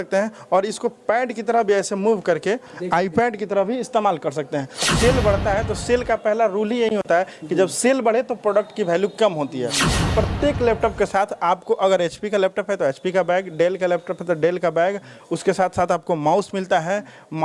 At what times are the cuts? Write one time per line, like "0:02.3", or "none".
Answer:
0:04.9
0:10.1

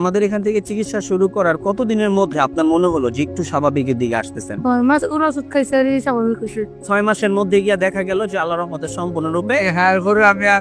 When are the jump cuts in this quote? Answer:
0:04.6
0:06.7

